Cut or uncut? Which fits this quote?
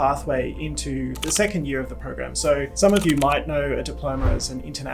cut